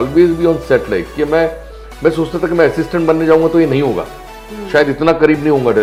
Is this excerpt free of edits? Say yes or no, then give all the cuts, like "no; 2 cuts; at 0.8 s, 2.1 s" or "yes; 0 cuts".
yes; 0 cuts